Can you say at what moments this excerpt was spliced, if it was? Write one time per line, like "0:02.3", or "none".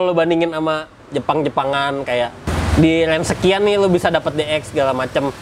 0:00.9
0:02.5